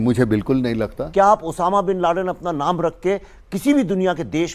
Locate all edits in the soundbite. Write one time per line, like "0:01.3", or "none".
0:01.0